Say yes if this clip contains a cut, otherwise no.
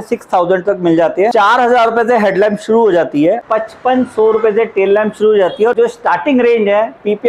yes